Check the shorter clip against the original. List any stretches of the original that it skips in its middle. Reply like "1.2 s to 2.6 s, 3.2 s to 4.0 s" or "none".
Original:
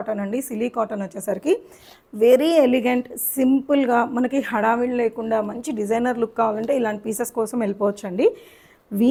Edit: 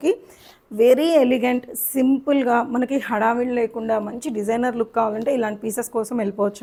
none